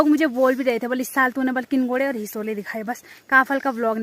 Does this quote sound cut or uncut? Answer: uncut